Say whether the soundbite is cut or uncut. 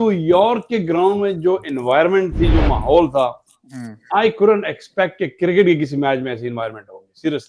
uncut